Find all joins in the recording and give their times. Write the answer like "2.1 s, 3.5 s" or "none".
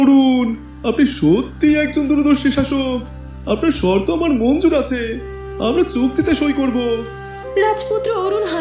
none